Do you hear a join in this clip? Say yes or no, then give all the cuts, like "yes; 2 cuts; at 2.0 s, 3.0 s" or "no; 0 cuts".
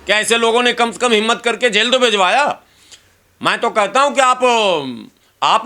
no; 0 cuts